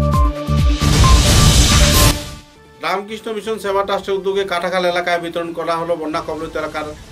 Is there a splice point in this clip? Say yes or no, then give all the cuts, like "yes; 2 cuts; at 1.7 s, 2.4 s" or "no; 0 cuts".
no; 0 cuts